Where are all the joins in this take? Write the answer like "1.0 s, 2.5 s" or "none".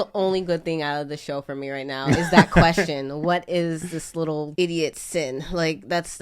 4.5 s